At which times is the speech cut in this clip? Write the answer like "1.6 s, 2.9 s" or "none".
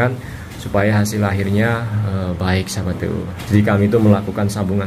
3.3 s